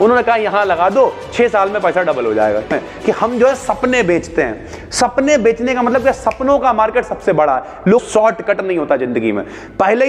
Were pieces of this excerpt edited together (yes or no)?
yes